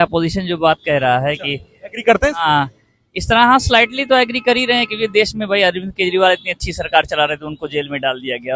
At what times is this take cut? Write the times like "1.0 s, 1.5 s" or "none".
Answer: none